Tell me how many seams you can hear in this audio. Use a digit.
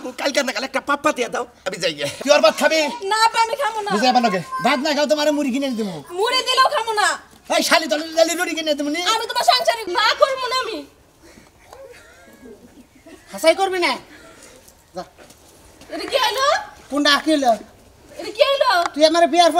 2